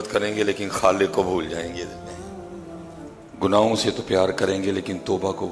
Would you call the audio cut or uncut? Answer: cut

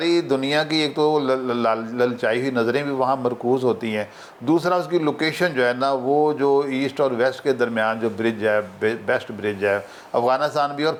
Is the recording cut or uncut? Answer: uncut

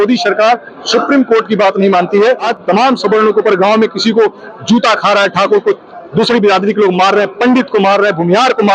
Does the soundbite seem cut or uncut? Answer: cut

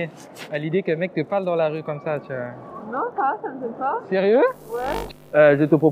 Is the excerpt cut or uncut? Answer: cut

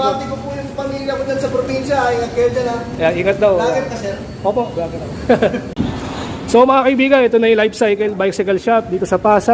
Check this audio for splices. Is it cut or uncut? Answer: cut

